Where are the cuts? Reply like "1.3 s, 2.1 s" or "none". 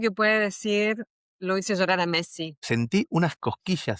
2.5 s